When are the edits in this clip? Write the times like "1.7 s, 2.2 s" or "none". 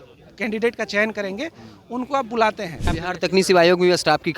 2.8 s